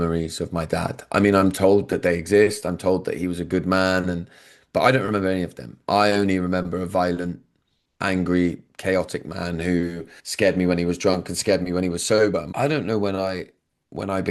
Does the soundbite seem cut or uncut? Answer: cut